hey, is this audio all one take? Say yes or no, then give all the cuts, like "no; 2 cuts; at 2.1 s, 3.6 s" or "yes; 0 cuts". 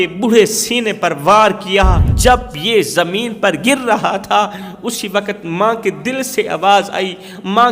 no; 1 cut; at 2.1 s